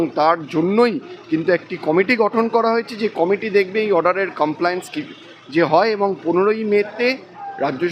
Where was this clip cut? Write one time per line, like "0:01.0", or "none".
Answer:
none